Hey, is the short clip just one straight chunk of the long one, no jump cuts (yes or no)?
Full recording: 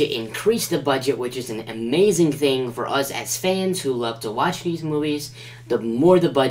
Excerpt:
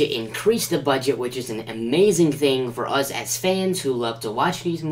yes